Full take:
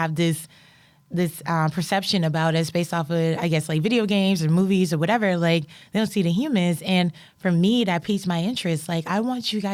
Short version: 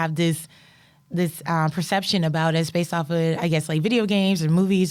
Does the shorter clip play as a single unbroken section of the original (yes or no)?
yes